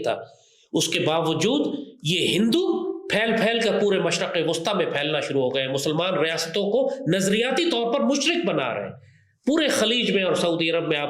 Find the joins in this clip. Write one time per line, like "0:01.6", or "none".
none